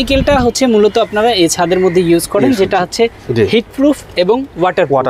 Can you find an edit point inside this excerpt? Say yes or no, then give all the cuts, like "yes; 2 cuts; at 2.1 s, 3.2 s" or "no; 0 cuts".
no; 0 cuts